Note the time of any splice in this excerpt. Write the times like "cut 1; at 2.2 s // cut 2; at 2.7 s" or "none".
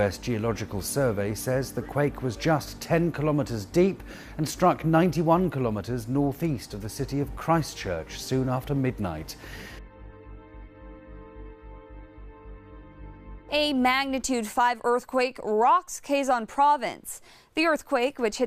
cut 1; at 4.5 s